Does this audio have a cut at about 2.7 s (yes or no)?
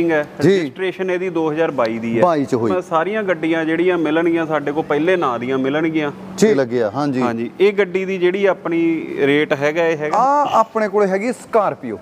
yes